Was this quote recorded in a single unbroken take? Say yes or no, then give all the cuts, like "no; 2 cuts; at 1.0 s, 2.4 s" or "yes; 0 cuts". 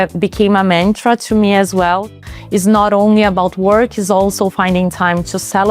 no; 1 cut; at 2.1 s